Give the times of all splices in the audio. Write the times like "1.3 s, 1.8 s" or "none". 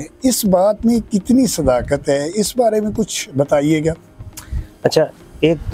none